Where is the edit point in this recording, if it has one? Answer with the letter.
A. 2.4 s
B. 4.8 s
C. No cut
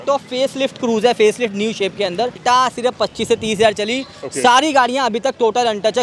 A